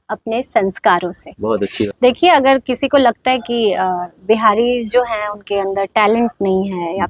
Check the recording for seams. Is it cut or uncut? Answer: cut